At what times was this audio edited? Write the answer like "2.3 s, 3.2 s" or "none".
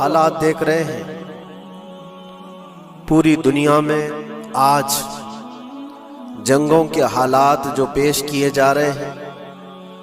none